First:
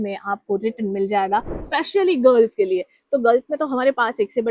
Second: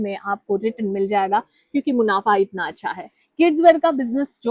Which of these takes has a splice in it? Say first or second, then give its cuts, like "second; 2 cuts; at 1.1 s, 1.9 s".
first; 1 cut; at 1.6 s